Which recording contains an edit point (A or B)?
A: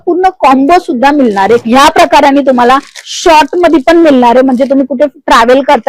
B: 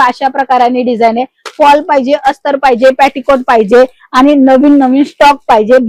A